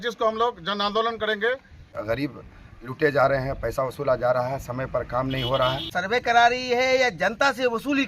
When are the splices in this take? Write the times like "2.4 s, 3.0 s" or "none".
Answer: 1.9 s, 5.9 s